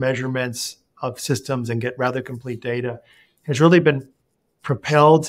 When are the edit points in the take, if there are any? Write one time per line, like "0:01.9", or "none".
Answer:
none